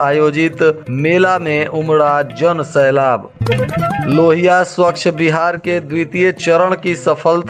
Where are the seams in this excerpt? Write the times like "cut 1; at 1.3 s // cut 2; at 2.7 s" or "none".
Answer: none